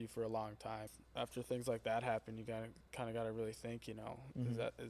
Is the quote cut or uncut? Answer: cut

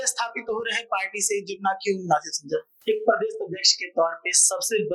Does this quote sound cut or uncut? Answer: cut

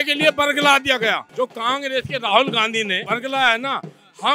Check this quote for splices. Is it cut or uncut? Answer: cut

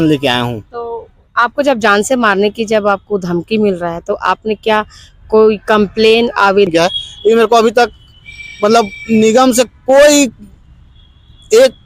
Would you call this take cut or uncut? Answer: cut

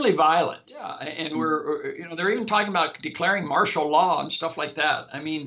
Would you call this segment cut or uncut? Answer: cut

